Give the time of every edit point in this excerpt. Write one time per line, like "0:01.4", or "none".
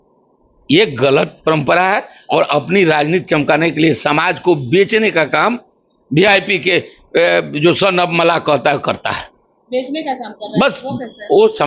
none